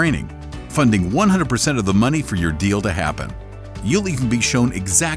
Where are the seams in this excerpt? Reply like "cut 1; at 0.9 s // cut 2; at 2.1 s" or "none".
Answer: cut 1; at 3.8 s